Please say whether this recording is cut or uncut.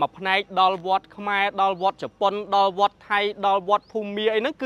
uncut